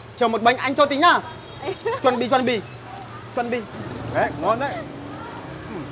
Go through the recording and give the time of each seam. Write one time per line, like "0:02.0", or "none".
0:03.9